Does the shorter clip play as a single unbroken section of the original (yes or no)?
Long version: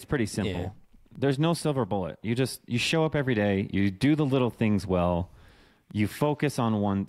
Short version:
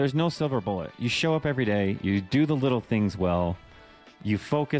no